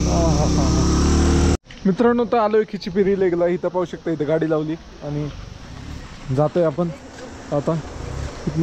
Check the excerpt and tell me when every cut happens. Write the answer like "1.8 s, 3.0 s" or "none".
1.6 s